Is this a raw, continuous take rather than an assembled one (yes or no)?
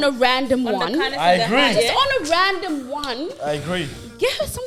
yes